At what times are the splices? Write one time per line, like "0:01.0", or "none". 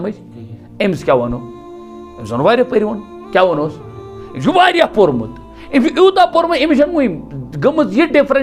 none